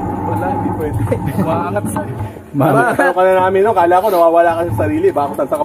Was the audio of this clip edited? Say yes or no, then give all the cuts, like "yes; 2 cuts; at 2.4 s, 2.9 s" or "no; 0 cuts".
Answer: no; 0 cuts